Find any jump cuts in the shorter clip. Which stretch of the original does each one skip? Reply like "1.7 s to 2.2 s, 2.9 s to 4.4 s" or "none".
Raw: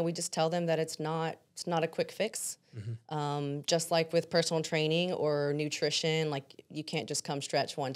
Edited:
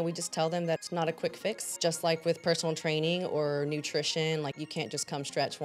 0.8 s to 1.5 s, 2.5 s to 3.6 s, 6.5 s to 6.8 s